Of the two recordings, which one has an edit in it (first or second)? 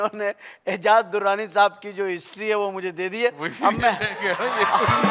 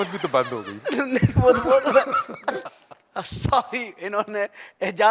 second